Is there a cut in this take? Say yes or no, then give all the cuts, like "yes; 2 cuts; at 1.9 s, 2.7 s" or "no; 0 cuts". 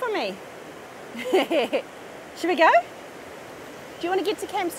no; 0 cuts